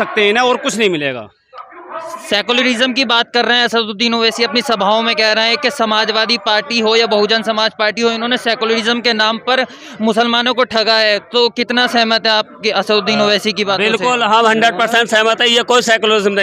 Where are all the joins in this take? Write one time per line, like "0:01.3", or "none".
none